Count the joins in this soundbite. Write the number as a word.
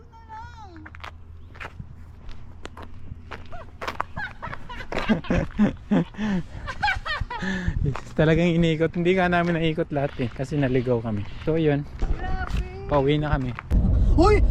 zero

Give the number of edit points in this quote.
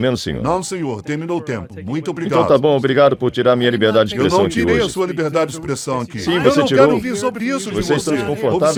zero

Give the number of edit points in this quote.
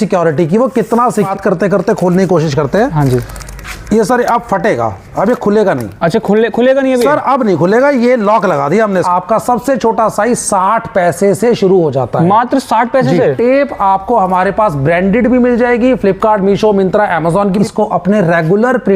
four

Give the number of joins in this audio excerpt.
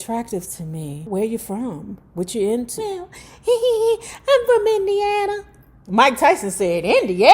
two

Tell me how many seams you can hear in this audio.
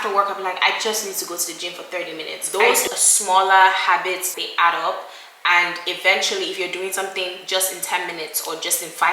two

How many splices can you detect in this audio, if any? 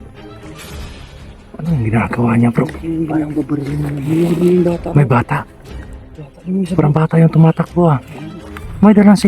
one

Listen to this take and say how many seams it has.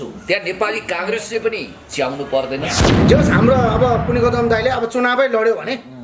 one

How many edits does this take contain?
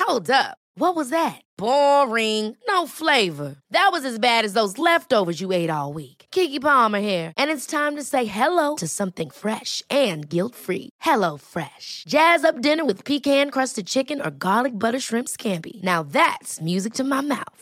zero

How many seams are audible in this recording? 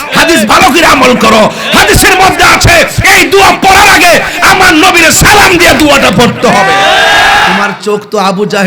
one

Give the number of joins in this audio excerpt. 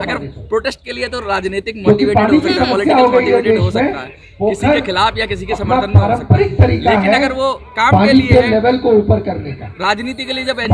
zero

